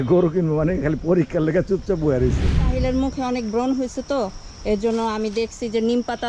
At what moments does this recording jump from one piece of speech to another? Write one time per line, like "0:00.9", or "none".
0:02.5